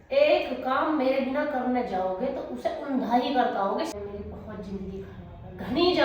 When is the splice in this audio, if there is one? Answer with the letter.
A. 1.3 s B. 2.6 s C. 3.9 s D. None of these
C